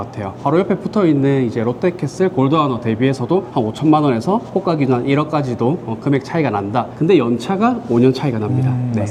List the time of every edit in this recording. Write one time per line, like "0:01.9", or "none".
none